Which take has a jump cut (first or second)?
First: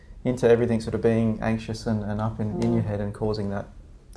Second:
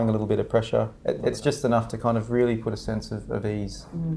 second